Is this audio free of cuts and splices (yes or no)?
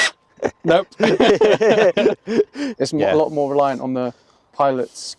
no